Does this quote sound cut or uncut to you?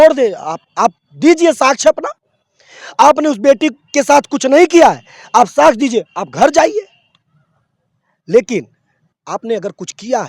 uncut